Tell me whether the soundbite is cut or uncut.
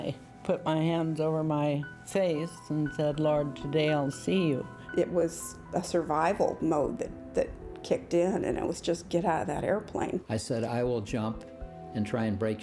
cut